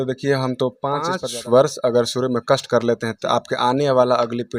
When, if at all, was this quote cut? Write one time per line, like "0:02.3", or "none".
0:01.2